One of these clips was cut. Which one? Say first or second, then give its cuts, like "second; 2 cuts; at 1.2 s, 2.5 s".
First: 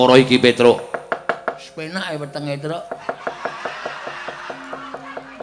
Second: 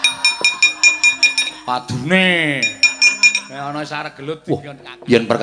second; 1 cut; at 4.4 s